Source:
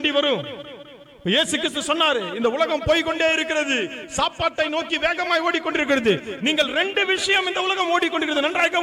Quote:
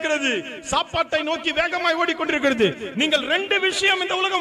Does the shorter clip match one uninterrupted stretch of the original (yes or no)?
yes